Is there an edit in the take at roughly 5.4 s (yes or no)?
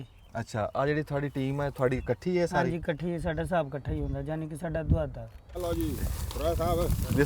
yes